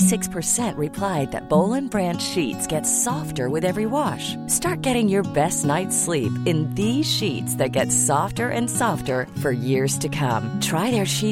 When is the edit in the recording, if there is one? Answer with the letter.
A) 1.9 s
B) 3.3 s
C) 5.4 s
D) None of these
D